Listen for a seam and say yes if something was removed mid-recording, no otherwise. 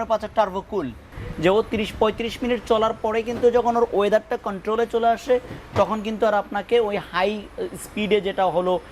yes